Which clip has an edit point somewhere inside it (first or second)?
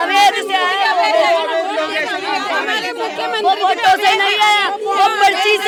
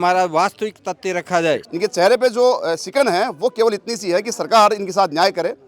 second